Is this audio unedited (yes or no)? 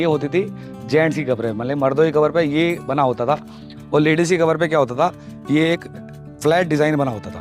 yes